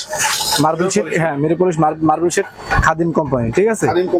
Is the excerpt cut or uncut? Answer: uncut